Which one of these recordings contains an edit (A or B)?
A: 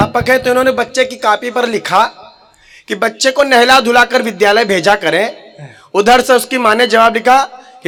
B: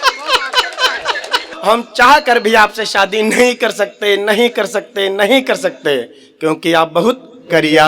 B